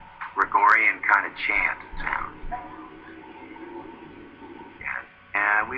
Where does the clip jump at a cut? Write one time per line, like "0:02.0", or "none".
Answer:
none